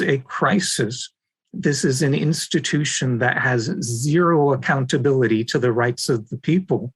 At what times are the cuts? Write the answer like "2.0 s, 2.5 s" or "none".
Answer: none